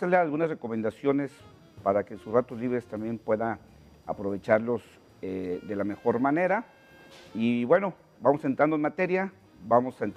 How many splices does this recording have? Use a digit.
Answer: 1